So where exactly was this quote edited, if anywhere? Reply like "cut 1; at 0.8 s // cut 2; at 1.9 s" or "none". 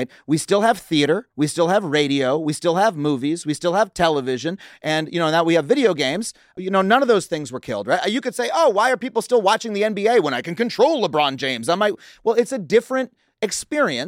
cut 1; at 6.5 s

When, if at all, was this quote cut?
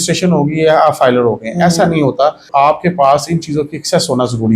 cut 1; at 2.5 s

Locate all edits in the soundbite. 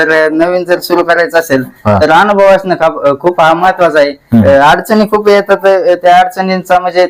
none

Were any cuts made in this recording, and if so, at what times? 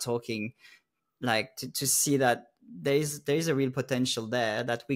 none

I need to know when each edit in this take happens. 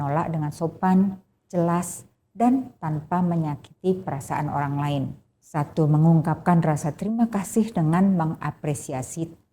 cut 1; at 5.4 s

